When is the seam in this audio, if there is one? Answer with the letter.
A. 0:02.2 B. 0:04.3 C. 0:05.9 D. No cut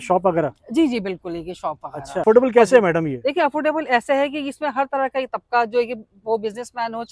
A